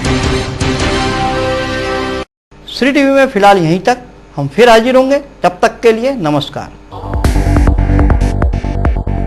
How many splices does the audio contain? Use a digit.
0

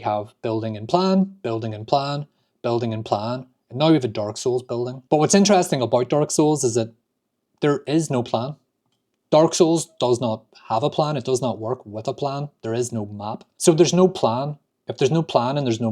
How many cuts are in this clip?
2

